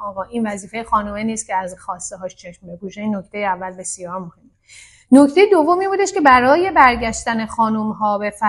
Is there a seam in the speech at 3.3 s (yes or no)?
no